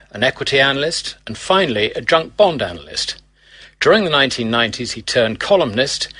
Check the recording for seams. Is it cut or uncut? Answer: cut